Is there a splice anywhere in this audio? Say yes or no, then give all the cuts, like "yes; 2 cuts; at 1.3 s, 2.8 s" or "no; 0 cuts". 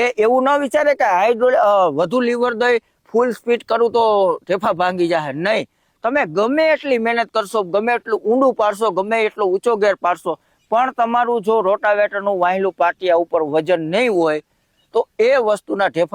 no; 0 cuts